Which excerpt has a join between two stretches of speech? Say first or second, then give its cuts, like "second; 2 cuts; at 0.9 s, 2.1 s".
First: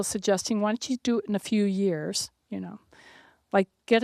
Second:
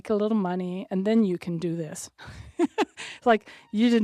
second; 1 cut; at 2.2 s